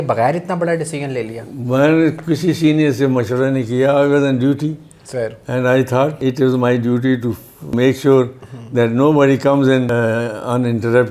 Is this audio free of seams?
no; 3 cuts; at 6.2 s, 7.7 s, 9.9 s

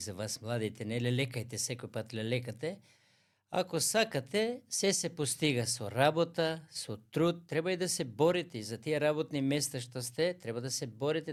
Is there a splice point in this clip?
no; 0 cuts

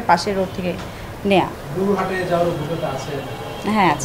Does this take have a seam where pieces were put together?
no; 0 cuts

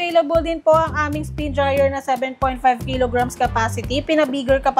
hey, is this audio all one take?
yes; 0 cuts

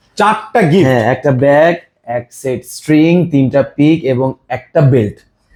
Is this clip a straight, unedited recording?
yes; 0 cuts

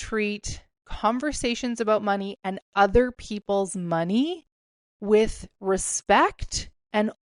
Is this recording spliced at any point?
no; 0 cuts

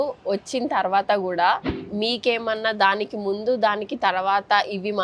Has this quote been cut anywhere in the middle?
yes; 1 cut; at 1.8 s

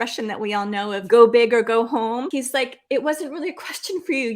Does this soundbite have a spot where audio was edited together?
yes; 2 cuts; at 1.0 s, 2.3 s

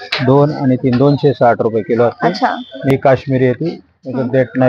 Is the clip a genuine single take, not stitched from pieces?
no; 1 cut; at 2.9 s

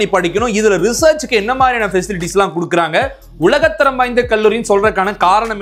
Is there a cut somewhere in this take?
no; 0 cuts

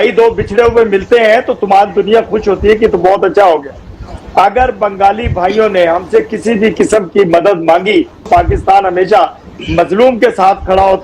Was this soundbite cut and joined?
yes; 1 cut; at 8.3 s

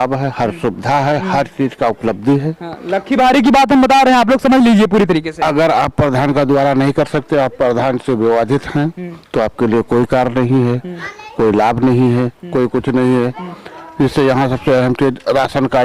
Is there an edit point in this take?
no; 0 cuts

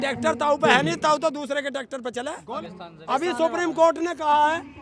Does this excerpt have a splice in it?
yes; 1 cut; at 2.6 s

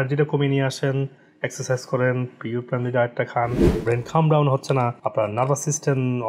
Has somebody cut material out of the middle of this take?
yes; 1 cut; at 3.8 s

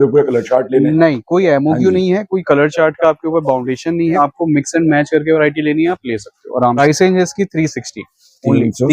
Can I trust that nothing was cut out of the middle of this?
no; 2 cuts; at 4.2 s, 6.8 s

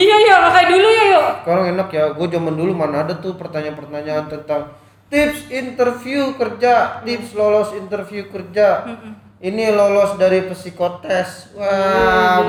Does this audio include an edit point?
no; 0 cuts

